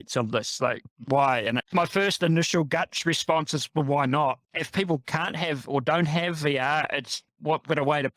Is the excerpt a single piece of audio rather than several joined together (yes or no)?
no